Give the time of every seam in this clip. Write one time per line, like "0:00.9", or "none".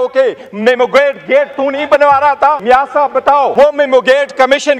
0:02.6
0:03.5